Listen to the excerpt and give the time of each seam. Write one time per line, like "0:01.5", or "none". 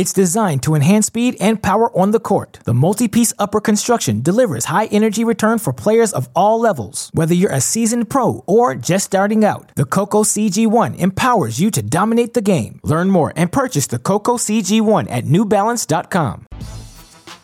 0:16.5